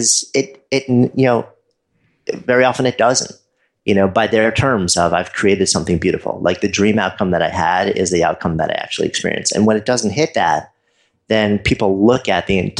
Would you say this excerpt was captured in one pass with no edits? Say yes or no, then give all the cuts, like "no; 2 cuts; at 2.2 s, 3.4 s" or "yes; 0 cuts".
yes; 0 cuts